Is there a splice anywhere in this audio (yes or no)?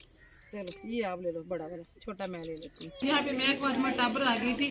yes